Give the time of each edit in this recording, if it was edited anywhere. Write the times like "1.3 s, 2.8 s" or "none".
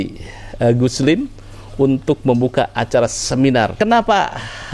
3.7 s